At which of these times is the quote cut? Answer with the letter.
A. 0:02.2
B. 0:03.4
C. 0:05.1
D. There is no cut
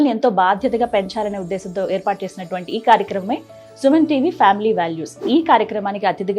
C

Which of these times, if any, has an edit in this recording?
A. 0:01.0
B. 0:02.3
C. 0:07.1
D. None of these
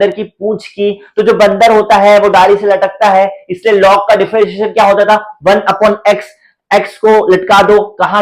D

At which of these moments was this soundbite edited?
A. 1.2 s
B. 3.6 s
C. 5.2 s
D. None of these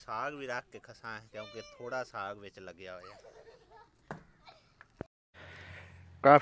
C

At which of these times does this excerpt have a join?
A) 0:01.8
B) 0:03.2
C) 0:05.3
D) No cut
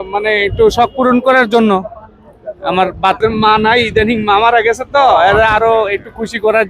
B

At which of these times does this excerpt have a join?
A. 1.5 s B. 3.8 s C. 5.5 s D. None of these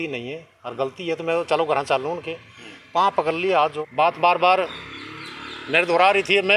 B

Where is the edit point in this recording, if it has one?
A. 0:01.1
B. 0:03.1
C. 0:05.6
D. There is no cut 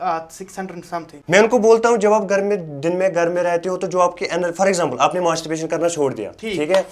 A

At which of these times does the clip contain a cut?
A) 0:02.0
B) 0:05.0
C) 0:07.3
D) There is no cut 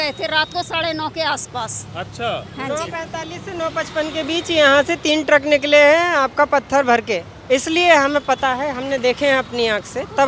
C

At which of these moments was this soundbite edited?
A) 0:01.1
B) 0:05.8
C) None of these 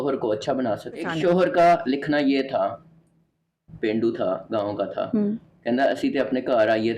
A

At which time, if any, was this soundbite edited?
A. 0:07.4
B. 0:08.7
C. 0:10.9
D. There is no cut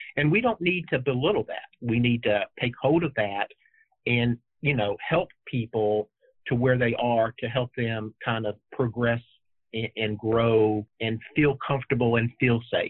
C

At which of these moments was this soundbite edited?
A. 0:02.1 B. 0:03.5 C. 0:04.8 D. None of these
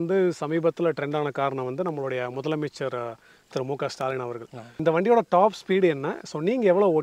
C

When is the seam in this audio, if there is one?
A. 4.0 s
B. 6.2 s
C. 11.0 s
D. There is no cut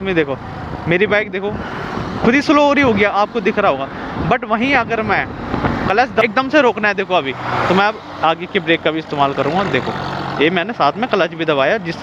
B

